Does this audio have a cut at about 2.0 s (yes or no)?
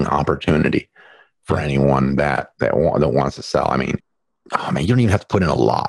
no